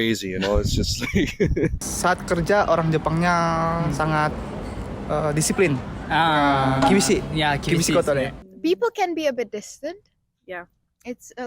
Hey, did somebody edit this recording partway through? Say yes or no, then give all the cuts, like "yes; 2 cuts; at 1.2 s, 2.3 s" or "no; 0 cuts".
yes; 2 cuts; at 1.9 s, 8.4 s